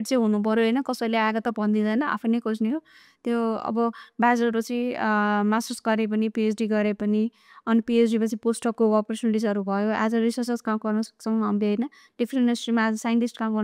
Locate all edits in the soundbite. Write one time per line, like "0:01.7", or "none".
none